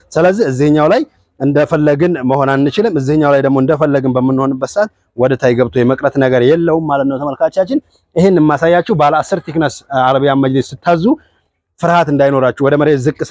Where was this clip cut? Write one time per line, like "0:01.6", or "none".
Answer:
none